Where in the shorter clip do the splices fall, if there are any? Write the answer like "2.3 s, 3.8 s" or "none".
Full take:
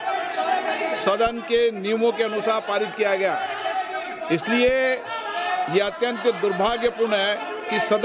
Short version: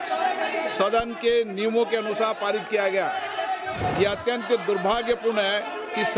3.8 s